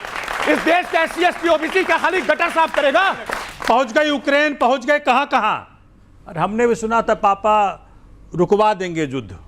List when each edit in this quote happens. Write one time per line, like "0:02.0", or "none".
0:03.2